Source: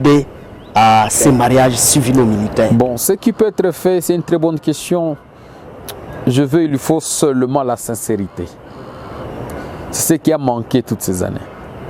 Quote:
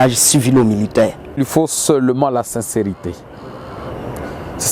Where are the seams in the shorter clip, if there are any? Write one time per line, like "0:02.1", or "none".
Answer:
0:01.2